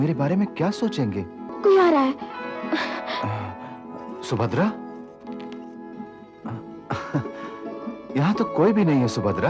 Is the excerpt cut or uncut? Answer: cut